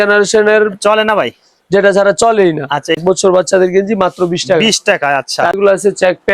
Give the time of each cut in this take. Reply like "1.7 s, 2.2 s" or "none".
3.0 s, 5.6 s